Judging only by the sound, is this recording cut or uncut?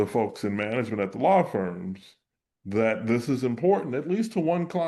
uncut